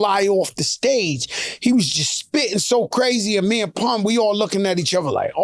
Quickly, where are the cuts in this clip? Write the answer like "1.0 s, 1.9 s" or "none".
none